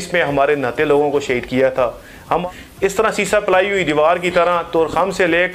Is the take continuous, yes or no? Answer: no